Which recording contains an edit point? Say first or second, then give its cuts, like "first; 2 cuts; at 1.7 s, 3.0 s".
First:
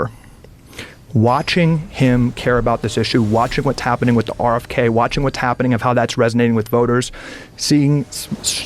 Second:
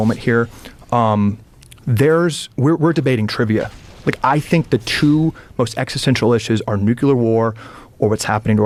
first; 1 cut; at 7.5 s